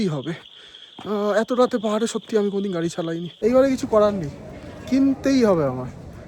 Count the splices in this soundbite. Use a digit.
1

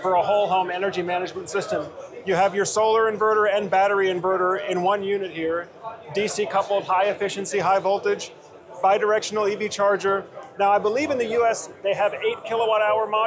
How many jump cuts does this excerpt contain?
0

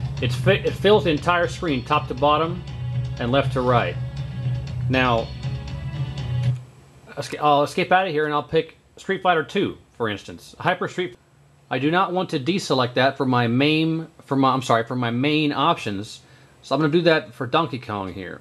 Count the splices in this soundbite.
0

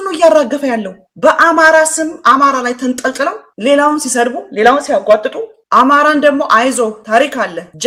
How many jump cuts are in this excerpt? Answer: 0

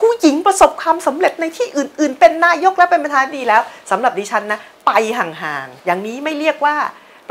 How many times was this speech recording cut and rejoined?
1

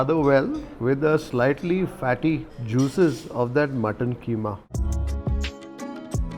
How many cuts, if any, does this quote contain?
1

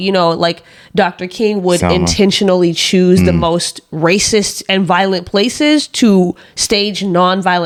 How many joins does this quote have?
0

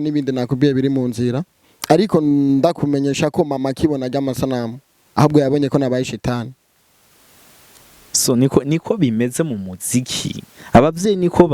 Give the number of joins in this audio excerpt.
0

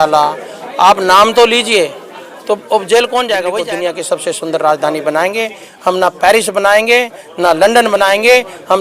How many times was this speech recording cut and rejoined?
1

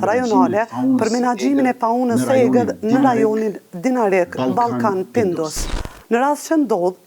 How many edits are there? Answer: 1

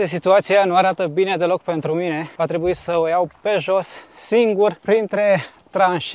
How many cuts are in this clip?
2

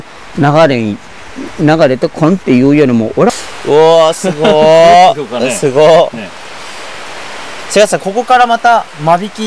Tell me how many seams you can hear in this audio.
1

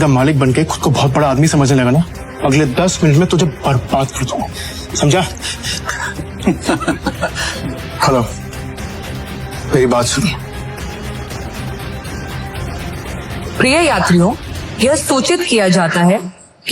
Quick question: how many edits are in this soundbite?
3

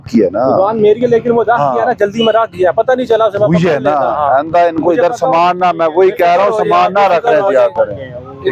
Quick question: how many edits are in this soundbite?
0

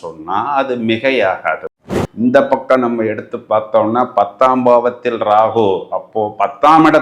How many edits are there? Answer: 1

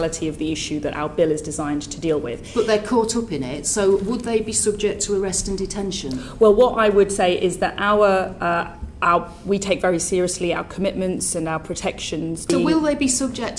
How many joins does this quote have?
1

